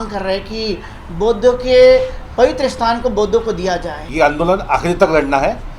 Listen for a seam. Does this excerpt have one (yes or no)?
yes